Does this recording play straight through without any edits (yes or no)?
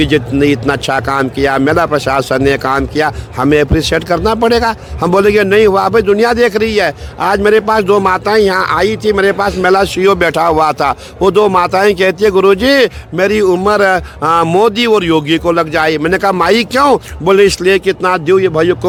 yes